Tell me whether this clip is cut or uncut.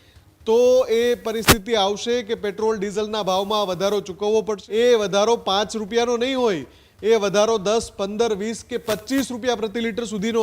cut